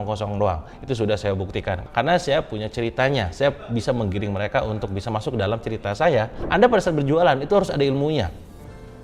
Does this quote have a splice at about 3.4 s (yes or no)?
no